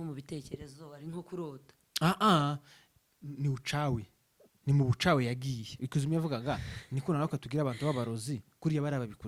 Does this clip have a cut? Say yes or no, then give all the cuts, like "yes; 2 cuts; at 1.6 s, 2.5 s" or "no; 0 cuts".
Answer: no; 0 cuts